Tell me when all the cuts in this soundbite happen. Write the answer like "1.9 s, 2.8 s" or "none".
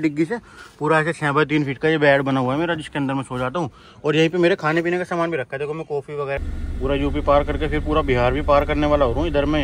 6.4 s